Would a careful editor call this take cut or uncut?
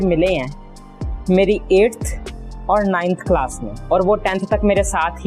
uncut